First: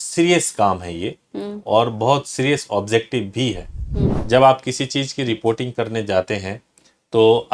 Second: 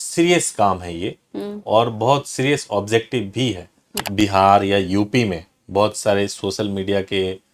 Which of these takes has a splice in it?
second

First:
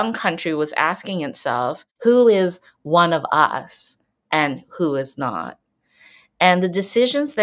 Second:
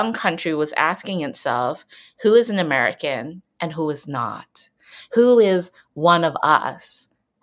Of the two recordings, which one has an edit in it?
first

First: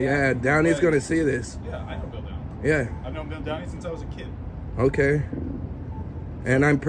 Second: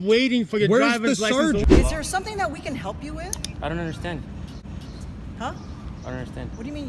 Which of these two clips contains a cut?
second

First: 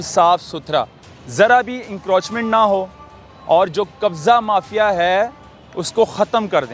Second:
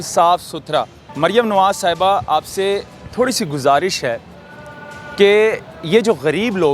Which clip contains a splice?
second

